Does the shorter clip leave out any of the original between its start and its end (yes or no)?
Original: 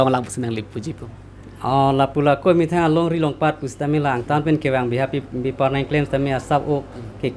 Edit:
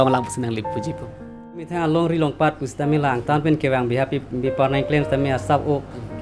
yes